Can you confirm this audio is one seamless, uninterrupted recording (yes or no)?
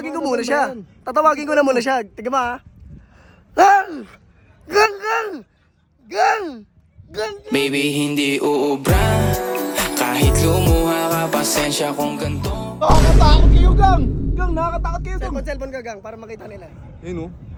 yes